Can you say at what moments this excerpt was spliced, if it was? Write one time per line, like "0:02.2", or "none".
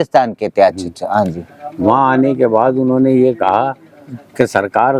none